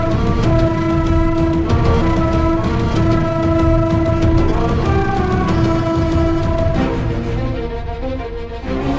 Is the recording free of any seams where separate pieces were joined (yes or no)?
no